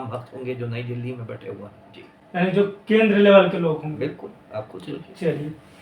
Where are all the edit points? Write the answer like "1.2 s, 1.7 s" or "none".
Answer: none